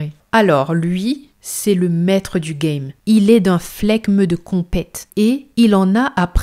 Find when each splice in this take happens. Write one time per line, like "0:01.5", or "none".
0:02.9